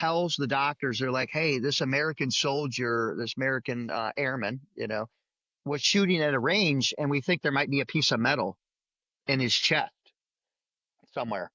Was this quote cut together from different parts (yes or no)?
no